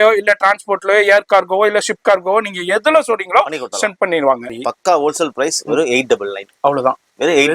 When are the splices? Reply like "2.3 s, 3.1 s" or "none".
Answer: 4.5 s

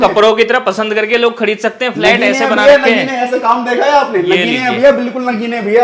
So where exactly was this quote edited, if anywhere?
none

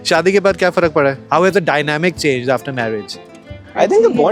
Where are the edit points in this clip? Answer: none

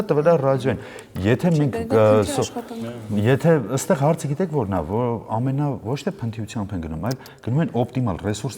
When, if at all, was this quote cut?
none

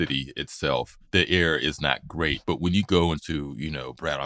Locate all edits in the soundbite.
1.0 s, 2.4 s, 3.2 s

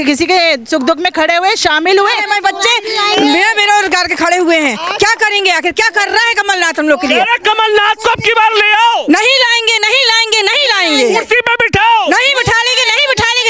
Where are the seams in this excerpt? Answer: 2.2 s

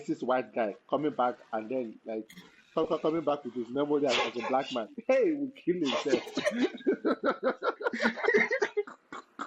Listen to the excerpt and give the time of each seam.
none

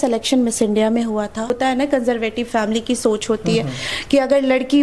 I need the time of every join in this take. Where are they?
1.5 s

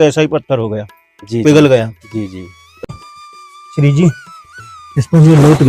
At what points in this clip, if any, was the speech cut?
2.9 s

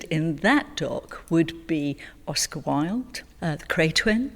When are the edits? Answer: 3.2 s

